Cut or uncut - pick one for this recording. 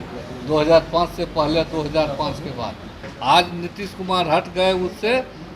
cut